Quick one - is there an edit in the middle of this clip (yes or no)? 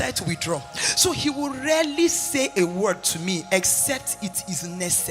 no